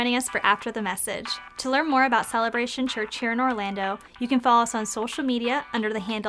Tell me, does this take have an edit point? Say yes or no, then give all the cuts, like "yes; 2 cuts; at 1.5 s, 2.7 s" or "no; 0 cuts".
no; 0 cuts